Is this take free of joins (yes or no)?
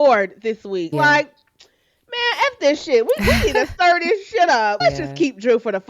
no